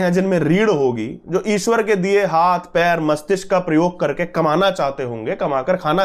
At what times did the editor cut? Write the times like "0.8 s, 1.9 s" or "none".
none